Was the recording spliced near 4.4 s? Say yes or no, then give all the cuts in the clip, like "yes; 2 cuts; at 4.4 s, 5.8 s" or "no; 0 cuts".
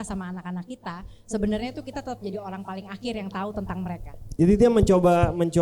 yes; 1 cut; at 4.4 s